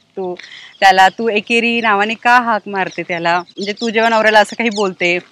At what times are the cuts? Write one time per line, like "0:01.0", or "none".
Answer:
none